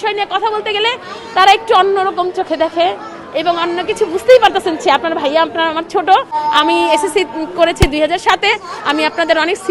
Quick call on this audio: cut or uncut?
uncut